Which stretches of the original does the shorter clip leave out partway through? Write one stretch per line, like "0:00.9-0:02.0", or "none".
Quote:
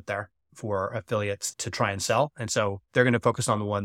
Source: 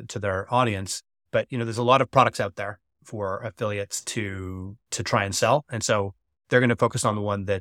0:04.0-0:04.8
0:06.1-0:06.4